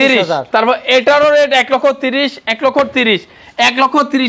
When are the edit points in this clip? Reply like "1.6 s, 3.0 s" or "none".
none